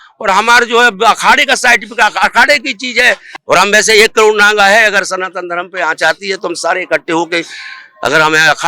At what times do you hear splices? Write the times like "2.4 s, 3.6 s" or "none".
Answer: 3.3 s